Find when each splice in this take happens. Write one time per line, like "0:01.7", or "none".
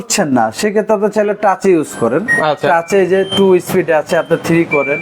none